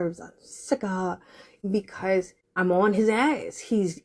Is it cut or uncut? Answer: cut